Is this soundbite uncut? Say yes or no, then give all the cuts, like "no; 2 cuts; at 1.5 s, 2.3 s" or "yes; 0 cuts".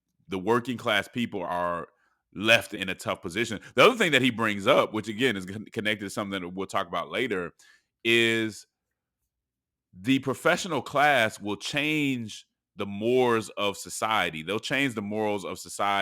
no; 2 cuts; at 1.5 s, 2.7 s